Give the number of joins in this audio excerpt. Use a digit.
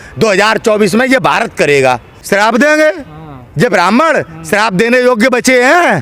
1